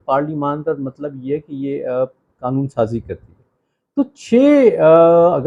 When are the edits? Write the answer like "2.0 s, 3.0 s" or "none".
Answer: none

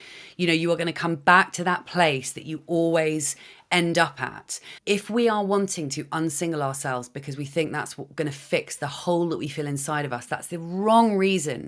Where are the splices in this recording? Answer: 4.7 s

